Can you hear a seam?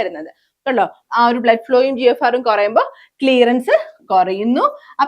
yes; 1 cut; at 1.0 s

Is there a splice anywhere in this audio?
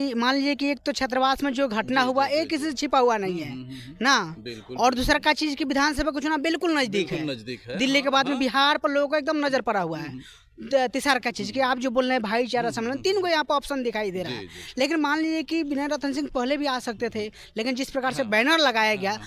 no; 0 cuts

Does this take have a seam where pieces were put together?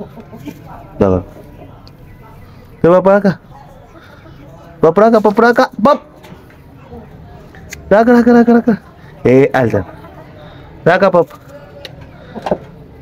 no; 0 cuts

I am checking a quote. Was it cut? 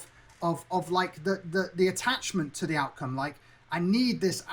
no; 0 cuts

